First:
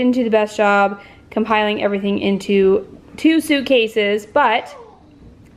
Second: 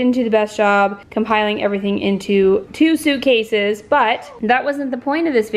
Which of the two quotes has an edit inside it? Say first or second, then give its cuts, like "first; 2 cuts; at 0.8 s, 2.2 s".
second; 3 cuts; at 1.0 s, 2.7 s, 4.3 s